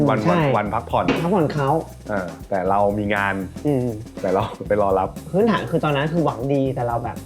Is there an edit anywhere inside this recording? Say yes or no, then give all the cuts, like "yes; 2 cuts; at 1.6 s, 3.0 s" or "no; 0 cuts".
yes; 1 cut; at 5.2 s